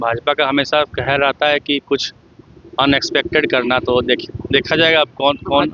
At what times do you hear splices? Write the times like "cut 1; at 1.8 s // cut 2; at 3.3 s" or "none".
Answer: none